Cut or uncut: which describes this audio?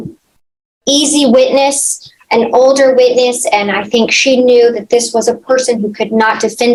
uncut